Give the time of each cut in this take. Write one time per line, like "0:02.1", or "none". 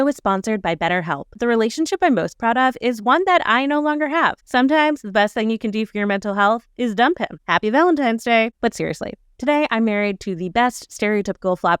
0:01.4

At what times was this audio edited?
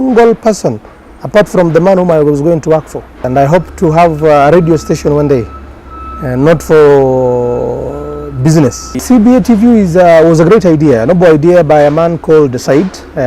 0:03.1
0:09.0

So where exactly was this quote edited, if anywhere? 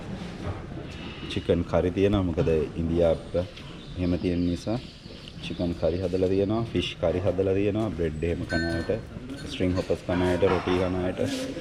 none

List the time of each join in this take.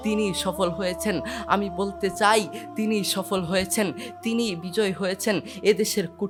none

